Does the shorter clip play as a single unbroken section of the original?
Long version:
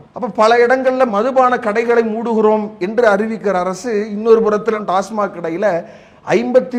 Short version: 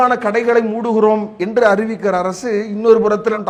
yes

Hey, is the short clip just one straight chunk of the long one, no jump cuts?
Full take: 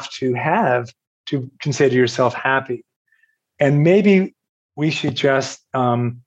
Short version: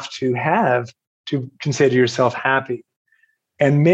yes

